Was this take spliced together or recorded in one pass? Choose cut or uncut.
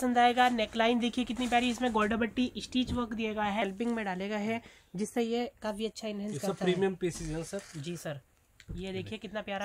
cut